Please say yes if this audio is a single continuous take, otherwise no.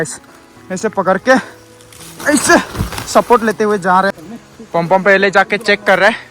no